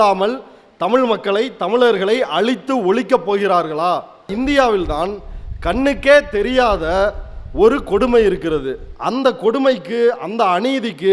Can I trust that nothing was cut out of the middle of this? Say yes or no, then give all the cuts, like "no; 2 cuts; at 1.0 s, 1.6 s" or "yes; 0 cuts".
no; 1 cut; at 4.3 s